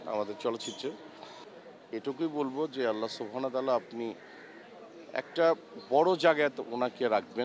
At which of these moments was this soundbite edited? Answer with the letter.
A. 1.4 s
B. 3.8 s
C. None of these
A